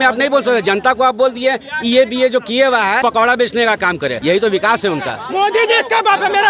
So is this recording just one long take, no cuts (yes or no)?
no